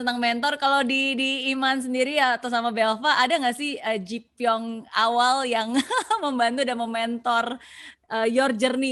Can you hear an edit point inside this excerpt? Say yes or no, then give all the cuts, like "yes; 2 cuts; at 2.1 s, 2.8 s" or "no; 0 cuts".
no; 0 cuts